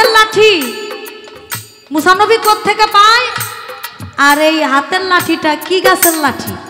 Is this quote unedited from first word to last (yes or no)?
yes